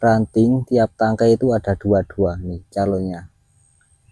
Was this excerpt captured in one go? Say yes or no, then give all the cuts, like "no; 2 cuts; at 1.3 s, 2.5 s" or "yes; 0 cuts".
yes; 0 cuts